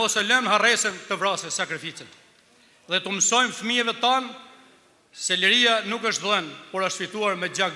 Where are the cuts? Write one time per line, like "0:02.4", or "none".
none